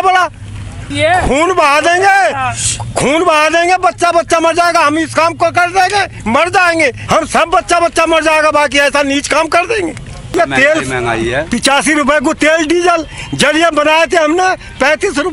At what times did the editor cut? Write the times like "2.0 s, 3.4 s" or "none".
0.8 s, 7.0 s, 10.3 s